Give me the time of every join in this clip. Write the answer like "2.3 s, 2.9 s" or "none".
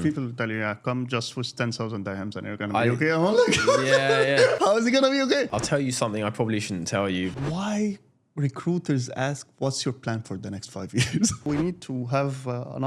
5.4 s, 7.3 s, 11.4 s